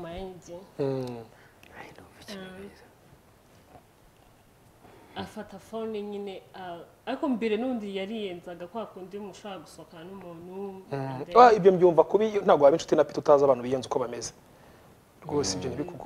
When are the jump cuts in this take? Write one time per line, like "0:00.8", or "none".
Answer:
none